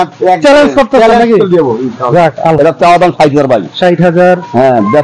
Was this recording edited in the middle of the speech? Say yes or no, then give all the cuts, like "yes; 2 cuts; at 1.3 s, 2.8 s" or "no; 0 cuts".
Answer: yes; 1 cut; at 2.6 s